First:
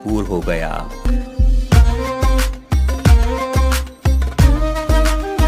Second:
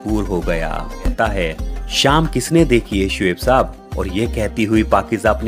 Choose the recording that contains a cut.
second; 1 cut; at 1.1 s

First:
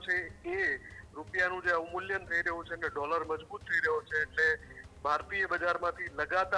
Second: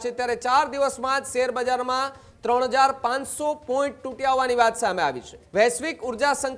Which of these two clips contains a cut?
second; 1 cut; at 5.4 s

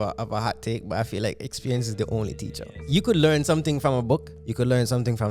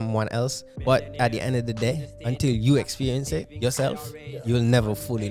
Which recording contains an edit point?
first; 2 cuts; at 2.8 s, 4.4 s

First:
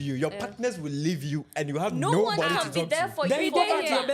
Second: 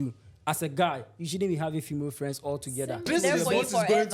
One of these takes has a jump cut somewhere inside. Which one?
second; 1 cut; at 3.1 s

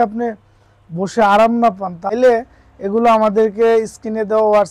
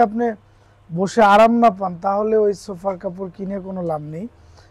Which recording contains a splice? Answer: first; 1 cut; at 2.1 s

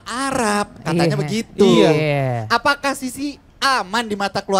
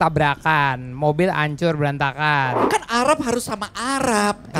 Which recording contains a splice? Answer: second; 1 cut; at 2.6 s

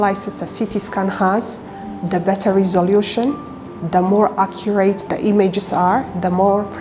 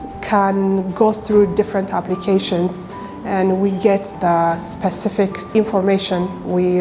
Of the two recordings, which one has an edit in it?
first; 1 cut; at 5.0 s

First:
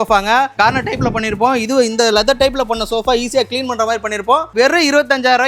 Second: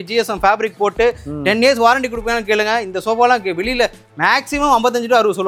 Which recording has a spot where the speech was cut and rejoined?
first; 1 cut; at 4.5 s

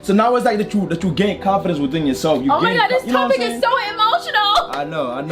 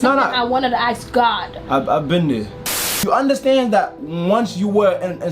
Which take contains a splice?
second; 1 cut; at 2.8 s

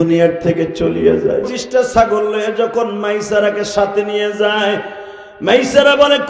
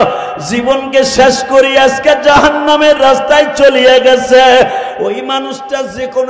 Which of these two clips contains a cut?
first; 1 cut; at 1.6 s

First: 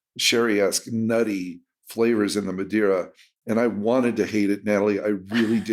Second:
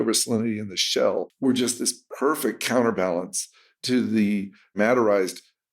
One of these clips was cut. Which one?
second; 2 cuts; at 1.3 s, 4.7 s

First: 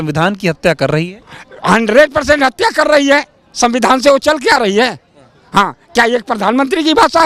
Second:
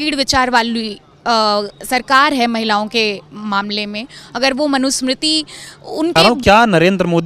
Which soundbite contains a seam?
second; 1 cut; at 6.2 s

